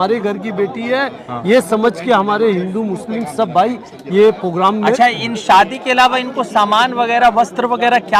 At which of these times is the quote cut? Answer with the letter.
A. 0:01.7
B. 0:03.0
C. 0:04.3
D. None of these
D